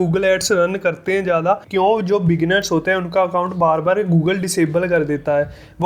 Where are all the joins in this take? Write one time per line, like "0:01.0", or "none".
0:01.7